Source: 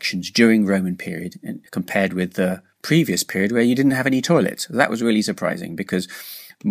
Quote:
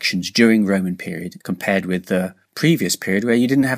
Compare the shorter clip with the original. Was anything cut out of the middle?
yes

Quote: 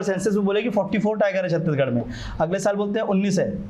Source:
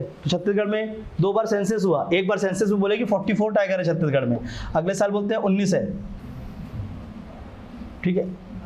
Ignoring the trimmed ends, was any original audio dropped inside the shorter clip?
no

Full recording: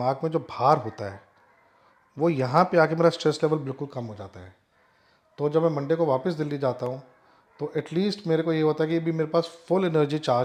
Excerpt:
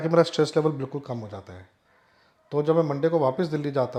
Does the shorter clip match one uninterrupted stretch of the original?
yes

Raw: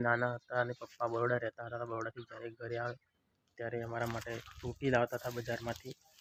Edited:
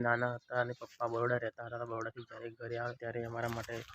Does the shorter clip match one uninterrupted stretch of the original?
no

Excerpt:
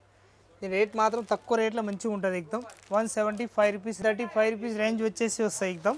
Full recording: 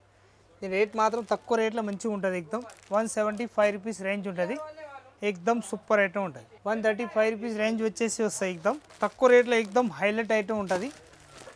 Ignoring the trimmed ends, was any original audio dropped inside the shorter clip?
yes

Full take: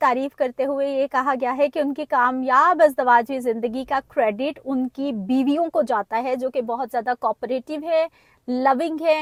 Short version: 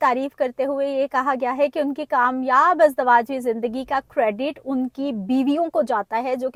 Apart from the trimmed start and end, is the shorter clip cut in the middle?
no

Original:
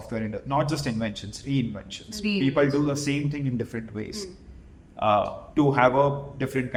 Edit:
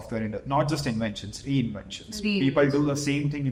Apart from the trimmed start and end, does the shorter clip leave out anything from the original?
no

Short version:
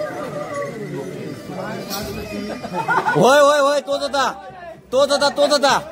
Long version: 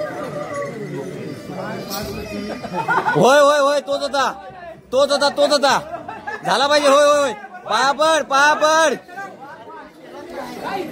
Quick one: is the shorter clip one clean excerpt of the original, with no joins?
yes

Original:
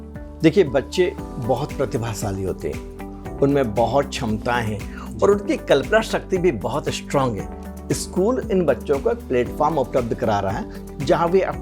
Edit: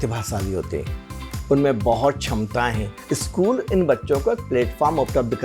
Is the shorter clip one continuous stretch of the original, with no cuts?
no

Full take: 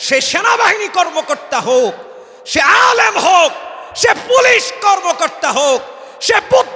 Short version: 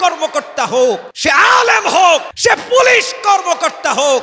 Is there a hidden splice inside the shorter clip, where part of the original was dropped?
yes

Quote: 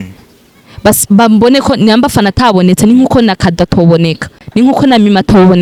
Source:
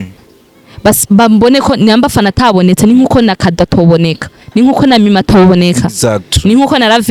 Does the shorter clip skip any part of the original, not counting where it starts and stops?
no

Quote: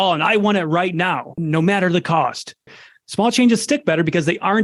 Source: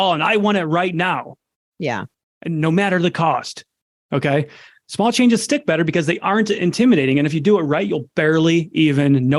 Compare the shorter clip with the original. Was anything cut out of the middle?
yes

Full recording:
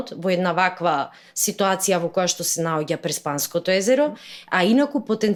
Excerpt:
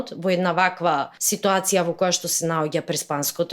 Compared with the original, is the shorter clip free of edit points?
no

